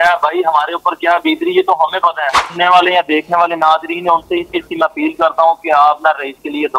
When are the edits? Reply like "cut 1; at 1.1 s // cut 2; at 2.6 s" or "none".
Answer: cut 1; at 2.4 s